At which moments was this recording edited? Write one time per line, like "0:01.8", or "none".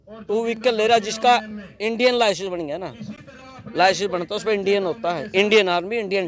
none